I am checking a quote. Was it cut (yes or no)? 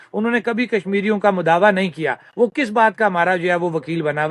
no